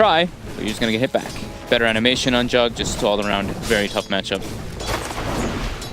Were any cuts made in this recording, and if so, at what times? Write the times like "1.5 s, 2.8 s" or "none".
3.2 s